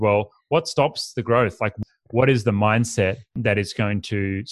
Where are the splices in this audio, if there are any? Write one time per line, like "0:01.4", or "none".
0:01.7
0:03.4